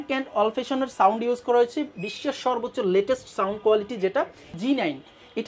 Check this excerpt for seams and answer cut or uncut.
cut